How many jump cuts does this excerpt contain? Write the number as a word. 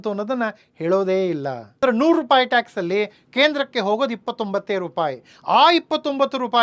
one